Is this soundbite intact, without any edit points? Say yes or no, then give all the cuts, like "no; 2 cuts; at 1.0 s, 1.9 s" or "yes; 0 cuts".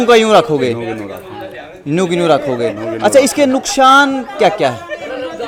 yes; 0 cuts